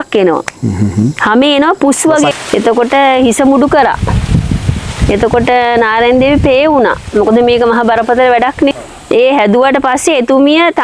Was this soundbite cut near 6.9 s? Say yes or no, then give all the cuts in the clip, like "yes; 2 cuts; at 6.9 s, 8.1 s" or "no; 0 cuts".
no; 2 cuts; at 2.3 s, 8.9 s